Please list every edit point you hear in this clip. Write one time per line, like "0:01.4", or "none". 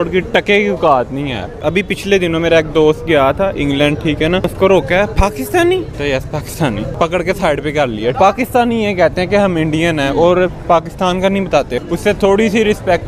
0:01.6
0:04.5
0:05.9
0:06.9
0:08.1
0:11.8